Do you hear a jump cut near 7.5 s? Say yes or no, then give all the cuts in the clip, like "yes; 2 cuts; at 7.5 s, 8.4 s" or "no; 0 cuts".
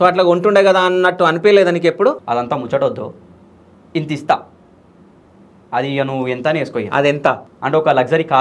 yes; 2 cuts; at 2.2 s, 7.5 s